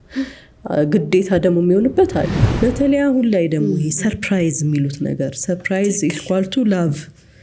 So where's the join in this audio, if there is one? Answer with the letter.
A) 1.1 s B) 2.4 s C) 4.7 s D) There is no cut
B